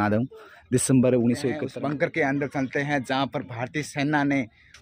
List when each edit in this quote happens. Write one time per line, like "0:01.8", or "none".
0:01.6